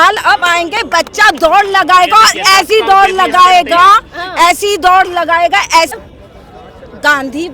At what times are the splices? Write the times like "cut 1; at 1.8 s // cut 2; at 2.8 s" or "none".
cut 1; at 6.0 s